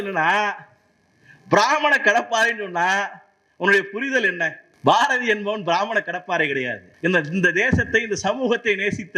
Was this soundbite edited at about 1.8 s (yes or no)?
no